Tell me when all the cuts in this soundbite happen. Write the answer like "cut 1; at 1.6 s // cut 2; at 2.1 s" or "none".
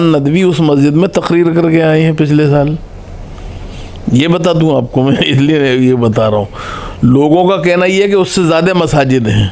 none